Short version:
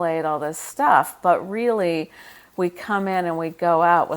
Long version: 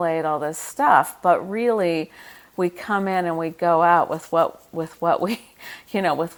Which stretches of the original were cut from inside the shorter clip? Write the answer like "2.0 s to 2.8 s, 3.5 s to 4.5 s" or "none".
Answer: none